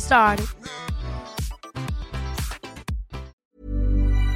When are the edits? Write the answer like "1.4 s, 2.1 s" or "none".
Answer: 3.4 s